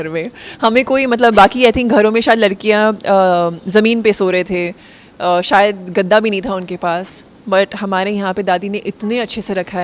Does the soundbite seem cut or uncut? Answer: uncut